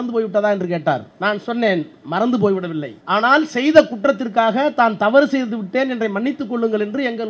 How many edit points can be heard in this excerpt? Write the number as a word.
two